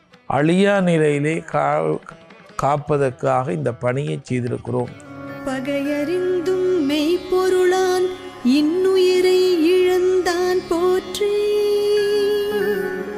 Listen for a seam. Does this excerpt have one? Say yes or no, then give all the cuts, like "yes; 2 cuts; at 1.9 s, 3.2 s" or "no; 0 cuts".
yes; 1 cut; at 5.3 s